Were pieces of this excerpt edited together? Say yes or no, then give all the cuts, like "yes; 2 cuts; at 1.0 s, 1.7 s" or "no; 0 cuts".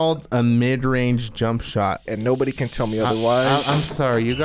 yes; 1 cut; at 2.0 s